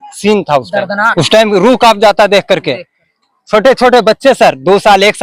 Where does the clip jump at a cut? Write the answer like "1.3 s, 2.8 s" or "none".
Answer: 1.1 s

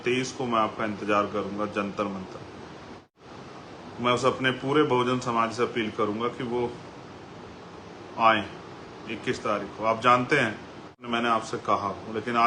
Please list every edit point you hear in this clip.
3.1 s, 11.0 s

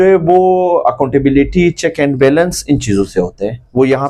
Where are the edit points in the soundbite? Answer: none

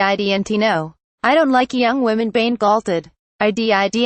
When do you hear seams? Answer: 1.0 s

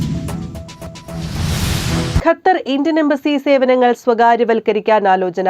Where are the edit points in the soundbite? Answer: 1.0 s

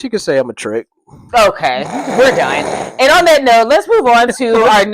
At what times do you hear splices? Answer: none

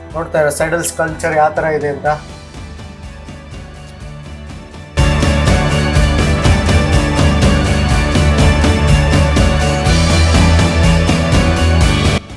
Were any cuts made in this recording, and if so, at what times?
none

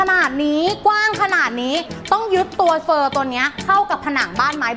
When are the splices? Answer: 2.0 s

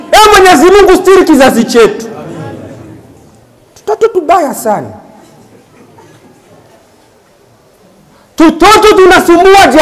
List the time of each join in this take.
none

